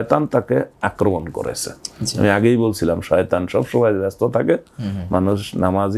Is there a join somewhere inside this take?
no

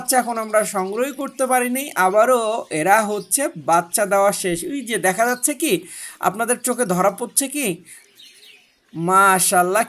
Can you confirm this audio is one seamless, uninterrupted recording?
no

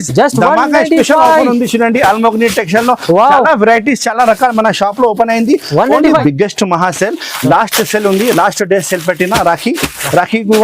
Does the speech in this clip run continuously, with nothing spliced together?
no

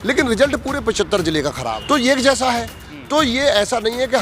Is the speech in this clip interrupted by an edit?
yes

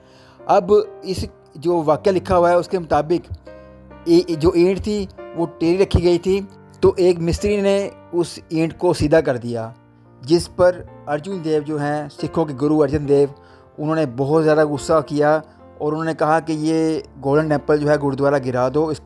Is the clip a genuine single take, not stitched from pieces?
yes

